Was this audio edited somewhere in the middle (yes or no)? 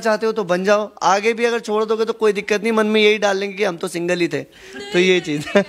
no